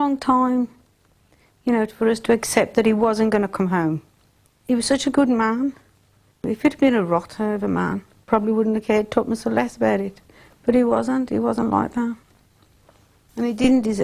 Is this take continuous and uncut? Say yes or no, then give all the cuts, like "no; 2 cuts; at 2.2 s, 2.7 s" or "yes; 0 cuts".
no; 3 cuts; at 4.5 s, 6.4 s, 8.2 s